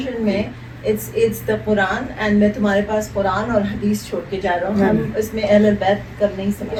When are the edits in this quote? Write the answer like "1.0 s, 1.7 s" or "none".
none